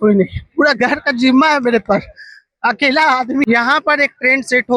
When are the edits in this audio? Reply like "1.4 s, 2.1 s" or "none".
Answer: 3.5 s